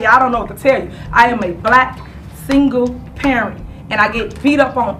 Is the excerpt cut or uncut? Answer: uncut